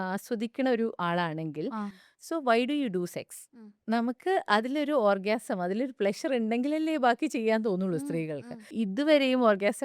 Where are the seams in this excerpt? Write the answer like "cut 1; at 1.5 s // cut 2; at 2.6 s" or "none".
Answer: cut 1; at 2.0 s // cut 2; at 8.7 s